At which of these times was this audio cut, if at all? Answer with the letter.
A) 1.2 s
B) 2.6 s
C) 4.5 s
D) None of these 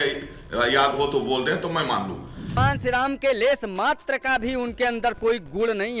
B